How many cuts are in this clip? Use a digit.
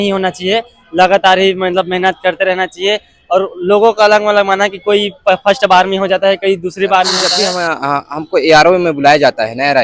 1